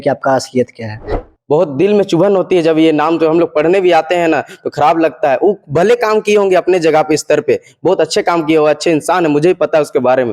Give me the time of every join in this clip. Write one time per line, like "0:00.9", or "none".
0:01.1